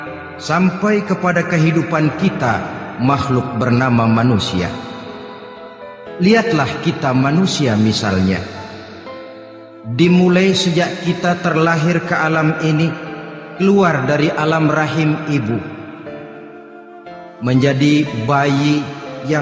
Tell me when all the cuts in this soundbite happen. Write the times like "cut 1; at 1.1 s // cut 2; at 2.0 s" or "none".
cut 1; at 16.0 s // cut 2; at 17.4 s